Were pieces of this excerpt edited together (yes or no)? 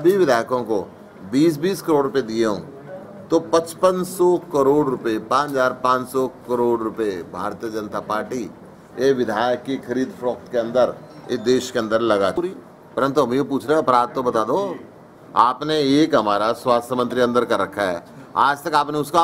yes